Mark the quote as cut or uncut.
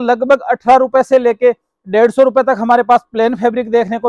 uncut